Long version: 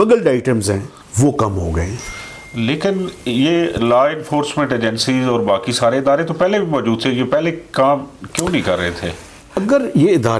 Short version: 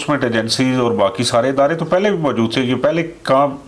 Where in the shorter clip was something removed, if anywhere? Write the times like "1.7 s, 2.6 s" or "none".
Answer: none